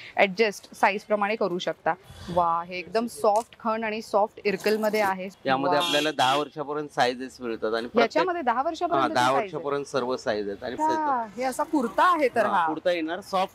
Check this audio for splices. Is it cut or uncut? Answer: cut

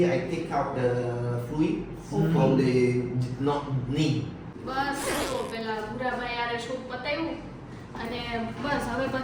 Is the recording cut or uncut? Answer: uncut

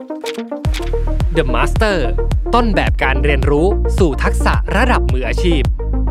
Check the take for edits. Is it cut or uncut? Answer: uncut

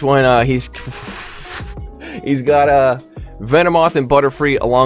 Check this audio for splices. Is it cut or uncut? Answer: uncut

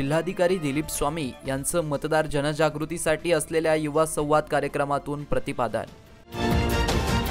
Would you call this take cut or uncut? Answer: uncut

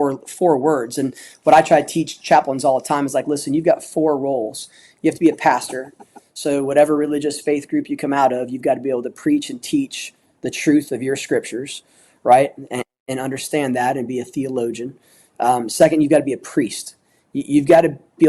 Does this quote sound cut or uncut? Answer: uncut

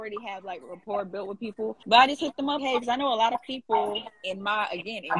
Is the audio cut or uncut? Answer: uncut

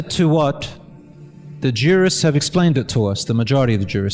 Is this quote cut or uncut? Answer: uncut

